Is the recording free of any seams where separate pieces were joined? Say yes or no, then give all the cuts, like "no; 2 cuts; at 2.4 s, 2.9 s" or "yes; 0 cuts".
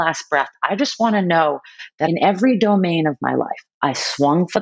no; 1 cut; at 2.1 s